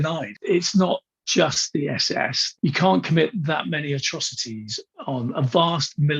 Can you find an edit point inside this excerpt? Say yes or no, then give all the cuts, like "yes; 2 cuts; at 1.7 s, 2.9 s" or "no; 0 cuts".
yes; 1 cut; at 4.9 s